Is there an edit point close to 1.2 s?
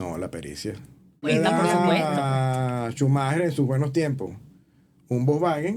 yes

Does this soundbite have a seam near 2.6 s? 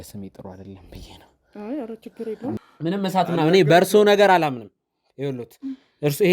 yes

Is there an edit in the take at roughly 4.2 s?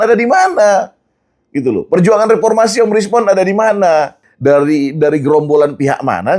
yes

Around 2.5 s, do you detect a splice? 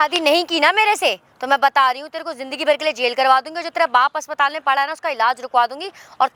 no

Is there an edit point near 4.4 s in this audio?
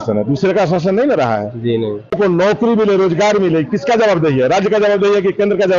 no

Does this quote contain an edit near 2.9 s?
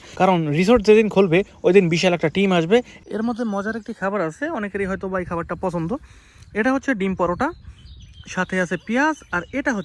yes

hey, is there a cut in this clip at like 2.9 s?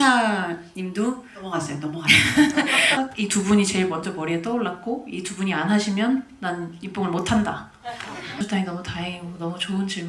yes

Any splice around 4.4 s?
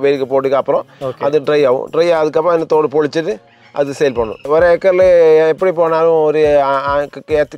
yes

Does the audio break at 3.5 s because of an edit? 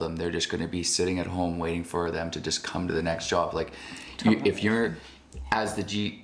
no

